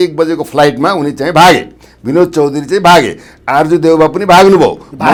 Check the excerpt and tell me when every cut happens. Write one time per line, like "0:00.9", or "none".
none